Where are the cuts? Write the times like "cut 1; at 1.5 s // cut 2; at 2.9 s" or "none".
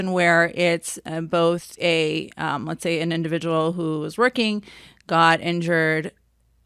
none